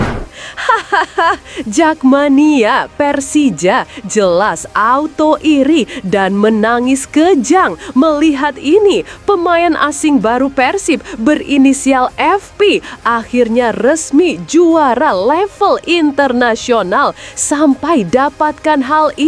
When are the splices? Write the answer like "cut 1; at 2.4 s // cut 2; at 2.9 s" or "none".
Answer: none